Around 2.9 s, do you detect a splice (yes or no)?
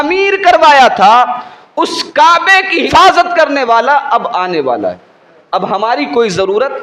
yes